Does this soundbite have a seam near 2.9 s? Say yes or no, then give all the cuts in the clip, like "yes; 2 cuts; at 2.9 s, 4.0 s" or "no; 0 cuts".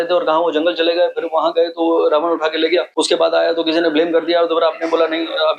yes; 1 cut; at 2.9 s